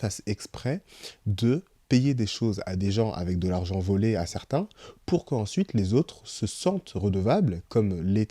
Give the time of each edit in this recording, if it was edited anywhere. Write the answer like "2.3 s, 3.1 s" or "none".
none